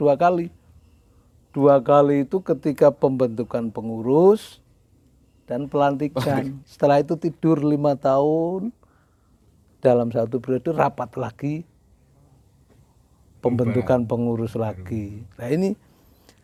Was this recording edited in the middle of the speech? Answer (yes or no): no